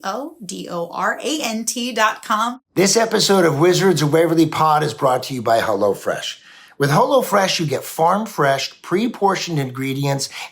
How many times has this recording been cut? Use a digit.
1